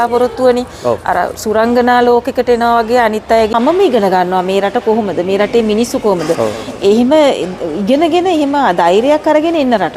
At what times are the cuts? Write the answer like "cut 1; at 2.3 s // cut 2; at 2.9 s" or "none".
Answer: cut 1; at 3.5 s